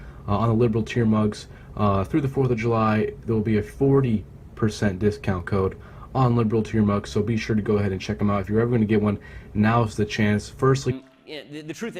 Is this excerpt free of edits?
yes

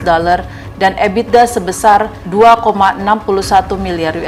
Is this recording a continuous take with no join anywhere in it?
yes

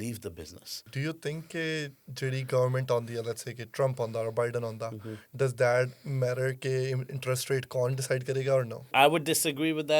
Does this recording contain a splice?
yes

